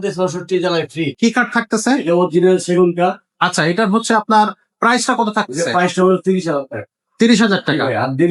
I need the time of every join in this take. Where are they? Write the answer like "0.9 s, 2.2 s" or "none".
1.1 s

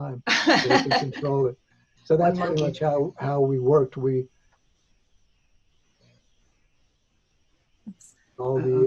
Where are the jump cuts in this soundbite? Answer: none

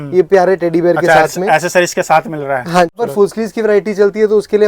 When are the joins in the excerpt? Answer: 3.0 s

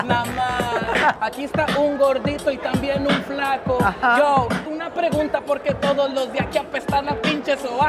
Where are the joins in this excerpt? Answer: 1.1 s, 4.7 s

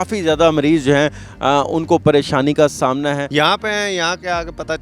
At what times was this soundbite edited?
3.2 s

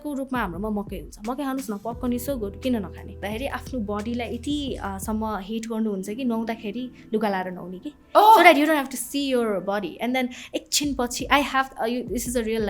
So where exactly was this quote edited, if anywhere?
3.2 s

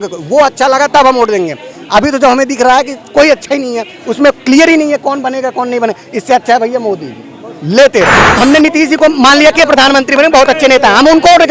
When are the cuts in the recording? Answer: 8.2 s

